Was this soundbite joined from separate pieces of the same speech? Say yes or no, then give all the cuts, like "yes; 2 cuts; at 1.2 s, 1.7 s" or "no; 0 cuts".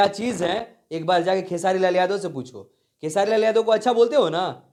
no; 0 cuts